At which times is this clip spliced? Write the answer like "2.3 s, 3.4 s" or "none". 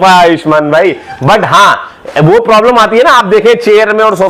none